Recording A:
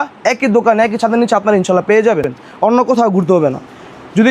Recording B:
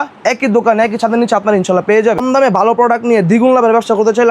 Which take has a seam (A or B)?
B